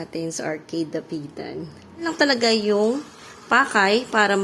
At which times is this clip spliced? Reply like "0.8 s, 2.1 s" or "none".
2.1 s